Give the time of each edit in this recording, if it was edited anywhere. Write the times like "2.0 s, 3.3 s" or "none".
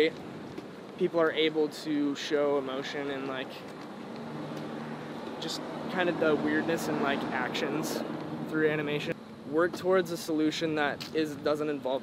9.1 s